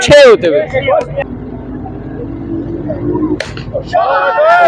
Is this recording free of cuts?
no; 1 cut; at 1.2 s

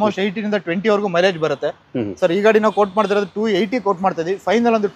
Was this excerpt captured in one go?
yes; 0 cuts

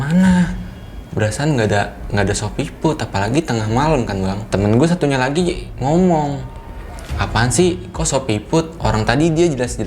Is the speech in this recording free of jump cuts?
no; 1 cut; at 4.4 s

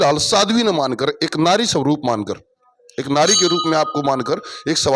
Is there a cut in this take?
no; 0 cuts

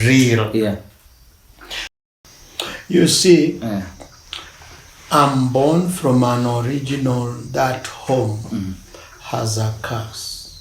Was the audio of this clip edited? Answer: yes; 1 cut; at 1.9 s

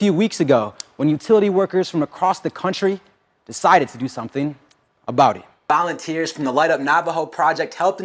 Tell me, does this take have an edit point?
yes; 1 cut; at 5.6 s

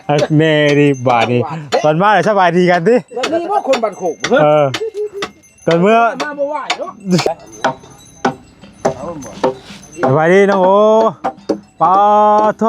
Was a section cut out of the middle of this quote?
yes; 1 cut; at 7.3 s

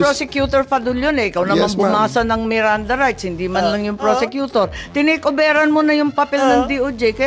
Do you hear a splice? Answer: no; 0 cuts

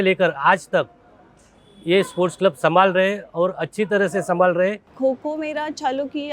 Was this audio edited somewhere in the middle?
yes; 1 cut; at 4.9 s

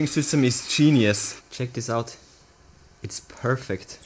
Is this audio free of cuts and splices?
yes; 0 cuts

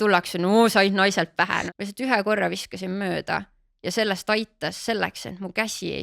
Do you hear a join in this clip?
yes; 1 cut; at 1.7 s

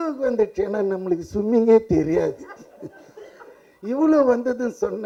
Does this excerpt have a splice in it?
no; 0 cuts

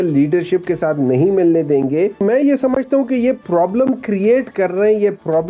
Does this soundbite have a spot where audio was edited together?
yes; 1 cut; at 2.2 s

